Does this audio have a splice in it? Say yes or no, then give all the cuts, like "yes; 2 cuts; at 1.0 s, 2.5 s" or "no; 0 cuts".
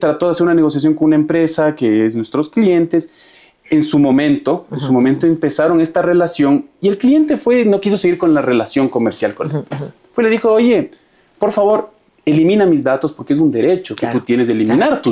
no; 0 cuts